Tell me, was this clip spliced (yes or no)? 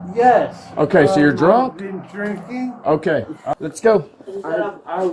yes